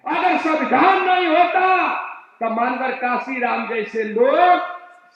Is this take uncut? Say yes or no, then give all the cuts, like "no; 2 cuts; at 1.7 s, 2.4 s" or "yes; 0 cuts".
yes; 0 cuts